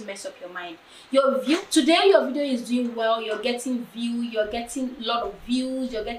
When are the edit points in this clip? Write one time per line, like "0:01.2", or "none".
none